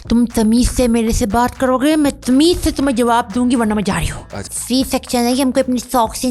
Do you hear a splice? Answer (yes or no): yes